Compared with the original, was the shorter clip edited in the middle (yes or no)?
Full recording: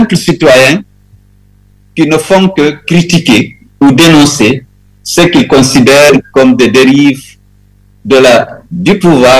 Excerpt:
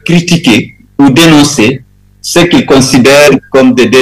no